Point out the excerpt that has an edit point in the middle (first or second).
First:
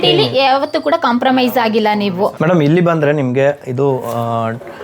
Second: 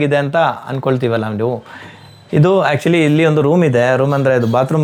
first